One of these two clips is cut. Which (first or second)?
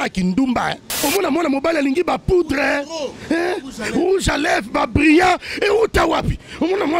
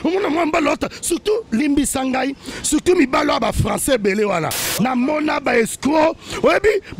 first